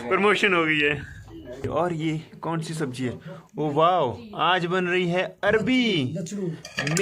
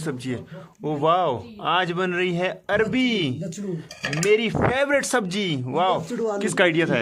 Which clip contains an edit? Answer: first; 1 cut; at 1.6 s

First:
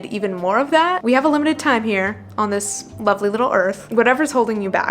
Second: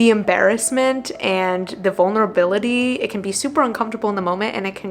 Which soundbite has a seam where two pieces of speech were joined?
first; 2 cuts; at 1.0 s, 3.8 s

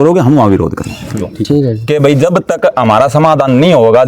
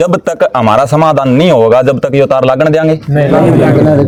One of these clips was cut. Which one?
first; 1 cut; at 1.3 s

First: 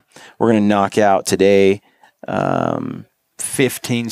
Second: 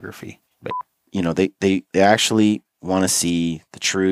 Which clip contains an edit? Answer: second; 1 cut; at 0.9 s

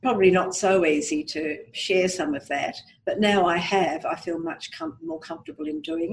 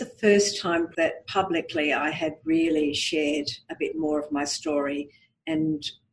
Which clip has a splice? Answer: second; 1 cut; at 0.9 s

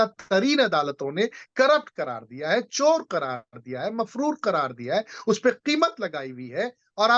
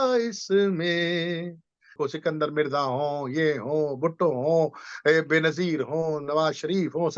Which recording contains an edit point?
second; 1 cut; at 1.9 s

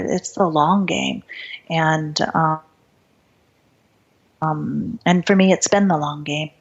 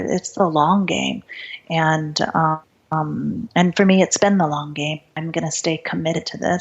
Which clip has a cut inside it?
second; 2 cuts; at 2.7 s, 5.1 s

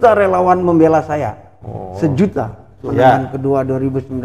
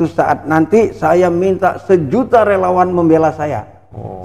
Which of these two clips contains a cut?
first; 1 cut; at 2.9 s

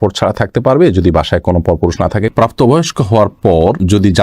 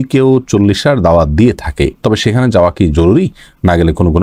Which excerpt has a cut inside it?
first; 1 cut; at 2.3 s

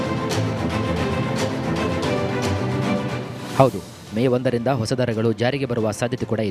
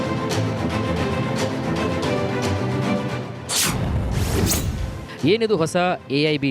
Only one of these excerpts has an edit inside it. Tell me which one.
first; 1 cut; at 3.0 s

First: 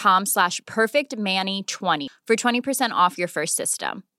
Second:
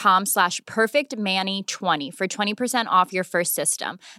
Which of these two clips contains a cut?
first; 1 cut; at 2.1 s

